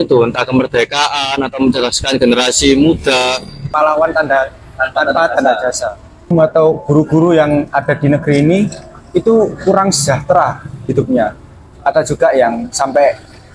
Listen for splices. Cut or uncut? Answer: cut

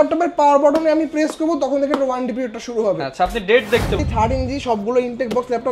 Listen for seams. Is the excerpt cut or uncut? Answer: cut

